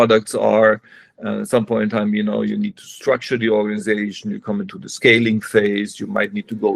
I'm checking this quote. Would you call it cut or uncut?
uncut